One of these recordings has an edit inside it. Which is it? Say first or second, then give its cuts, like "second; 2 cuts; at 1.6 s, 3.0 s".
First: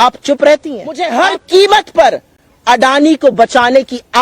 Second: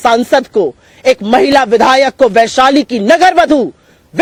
first; 1 cut; at 1.1 s